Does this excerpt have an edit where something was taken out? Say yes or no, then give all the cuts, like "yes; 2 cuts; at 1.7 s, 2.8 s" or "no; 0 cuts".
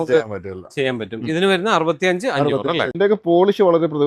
yes; 1 cut; at 2.9 s